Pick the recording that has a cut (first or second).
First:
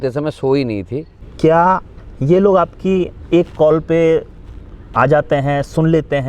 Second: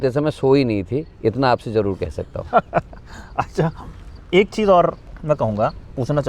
first